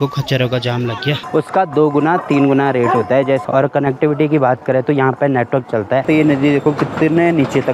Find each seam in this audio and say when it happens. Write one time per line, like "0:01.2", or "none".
0:01.2
0:03.4
0:06.0